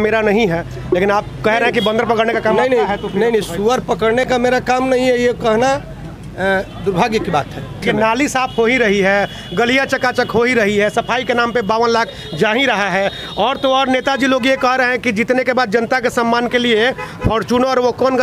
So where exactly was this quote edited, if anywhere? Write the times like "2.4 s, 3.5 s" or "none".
7.8 s